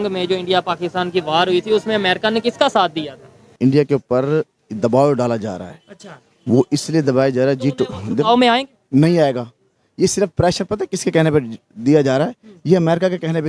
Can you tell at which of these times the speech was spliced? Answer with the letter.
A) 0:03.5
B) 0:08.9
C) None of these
A